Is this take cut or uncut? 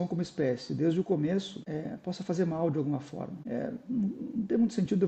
cut